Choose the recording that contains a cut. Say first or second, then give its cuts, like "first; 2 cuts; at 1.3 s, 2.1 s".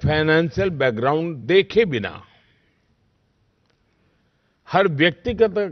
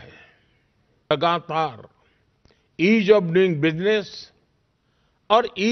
second; 1 cut; at 1.1 s